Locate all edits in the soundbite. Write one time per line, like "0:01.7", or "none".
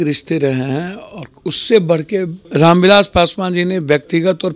0:02.4